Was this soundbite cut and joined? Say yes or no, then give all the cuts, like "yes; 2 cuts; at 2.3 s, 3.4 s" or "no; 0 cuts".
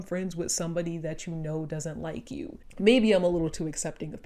yes; 1 cut; at 2.5 s